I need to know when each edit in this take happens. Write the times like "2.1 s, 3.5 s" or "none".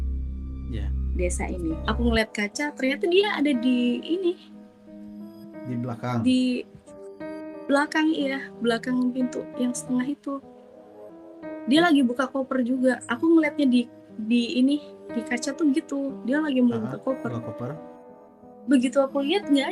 1.8 s